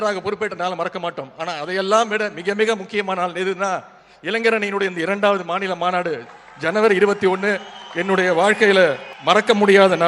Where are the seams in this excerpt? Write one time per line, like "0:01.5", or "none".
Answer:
0:09.1